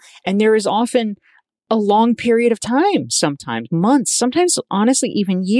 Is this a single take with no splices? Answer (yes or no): yes